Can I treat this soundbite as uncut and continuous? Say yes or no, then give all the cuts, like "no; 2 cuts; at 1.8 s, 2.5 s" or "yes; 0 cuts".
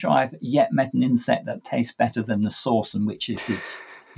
yes; 0 cuts